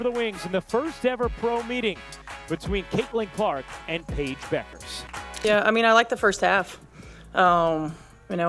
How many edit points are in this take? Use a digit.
1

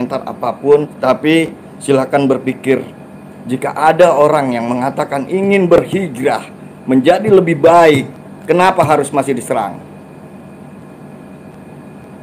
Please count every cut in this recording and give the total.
1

